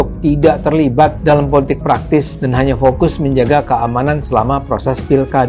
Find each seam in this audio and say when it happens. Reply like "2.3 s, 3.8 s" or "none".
1.2 s, 2.4 s